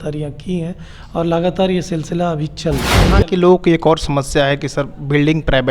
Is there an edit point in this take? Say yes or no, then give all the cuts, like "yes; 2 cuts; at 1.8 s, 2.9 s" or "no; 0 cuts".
yes; 1 cut; at 3.1 s